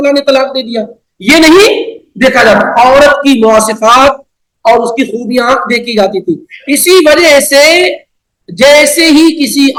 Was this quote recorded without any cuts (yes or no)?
yes